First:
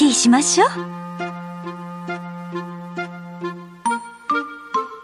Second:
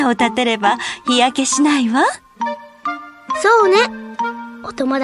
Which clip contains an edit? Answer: first; 1 cut; at 2.7 s

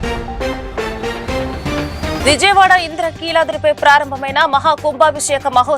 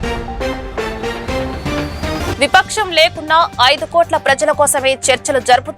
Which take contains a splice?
second; 1 cut; at 2.2 s

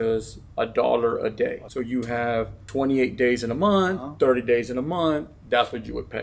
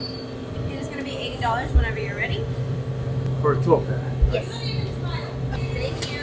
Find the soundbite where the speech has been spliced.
first; 2 cuts; at 1.6 s, 2.6 s

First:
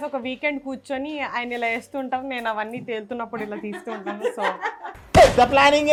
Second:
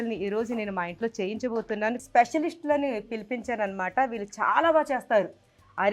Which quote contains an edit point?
second; 1 cut; at 2.0 s

